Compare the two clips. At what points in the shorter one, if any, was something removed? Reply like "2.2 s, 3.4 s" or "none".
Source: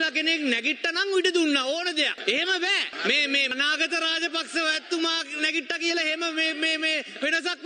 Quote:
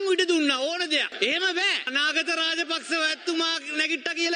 1.9 s